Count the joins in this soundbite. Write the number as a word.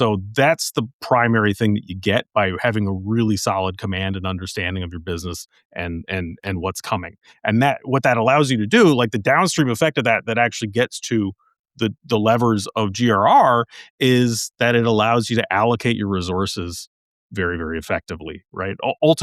zero